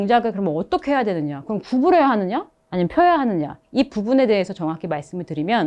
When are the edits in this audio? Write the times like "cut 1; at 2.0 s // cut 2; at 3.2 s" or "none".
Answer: none

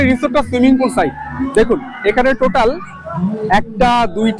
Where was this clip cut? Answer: none

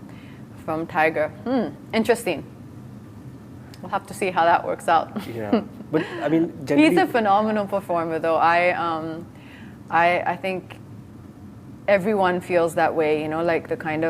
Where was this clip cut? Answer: none

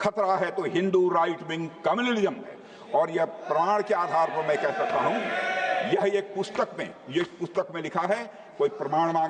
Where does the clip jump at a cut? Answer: none

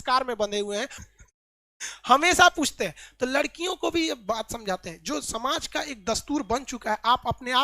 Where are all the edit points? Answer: cut 1; at 1.0 s

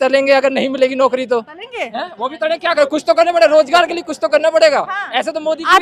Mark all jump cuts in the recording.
none

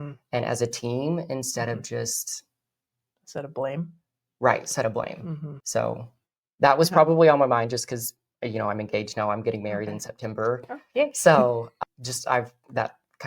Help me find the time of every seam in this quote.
cut 1; at 5.5 s // cut 2; at 11.7 s

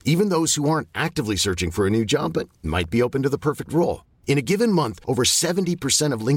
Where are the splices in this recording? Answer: none

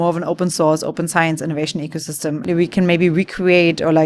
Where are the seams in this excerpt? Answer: cut 1; at 2.4 s

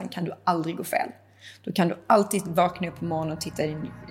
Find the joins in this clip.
none

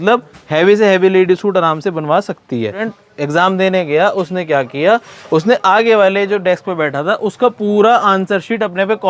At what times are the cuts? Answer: cut 1; at 2.9 s

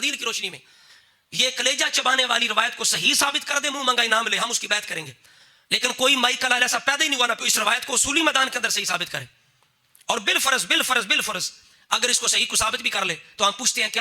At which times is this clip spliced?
cut 1; at 7.5 s

